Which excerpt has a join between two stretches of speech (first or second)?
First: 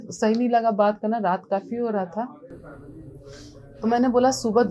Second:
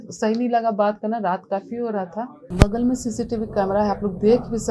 second